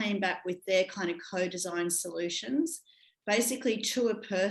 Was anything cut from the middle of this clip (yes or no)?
no